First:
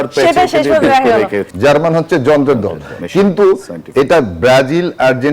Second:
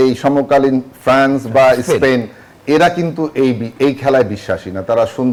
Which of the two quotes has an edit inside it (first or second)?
first